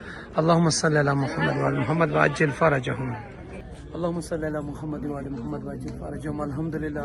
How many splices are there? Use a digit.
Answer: 0